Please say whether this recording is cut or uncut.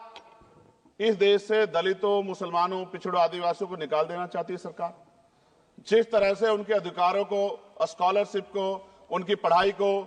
uncut